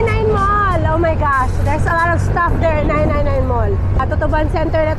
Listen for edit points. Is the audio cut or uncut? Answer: cut